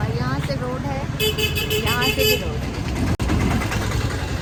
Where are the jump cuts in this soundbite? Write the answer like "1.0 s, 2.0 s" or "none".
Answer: none